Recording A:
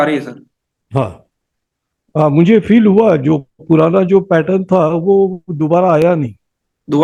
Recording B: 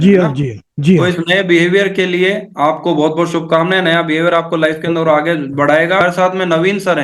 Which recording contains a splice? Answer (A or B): B